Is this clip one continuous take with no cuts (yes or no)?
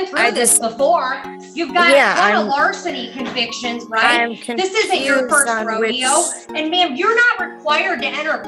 yes